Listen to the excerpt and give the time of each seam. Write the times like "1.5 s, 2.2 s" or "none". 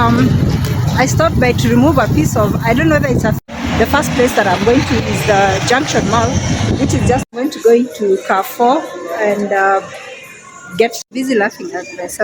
3.4 s, 7.2 s, 11.0 s